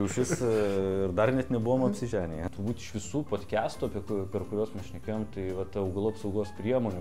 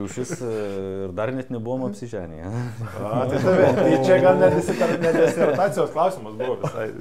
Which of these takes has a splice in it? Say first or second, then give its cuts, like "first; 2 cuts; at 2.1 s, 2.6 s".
first; 1 cut; at 2.4 s